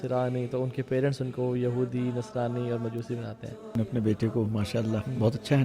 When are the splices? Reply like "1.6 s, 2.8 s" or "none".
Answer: 3.7 s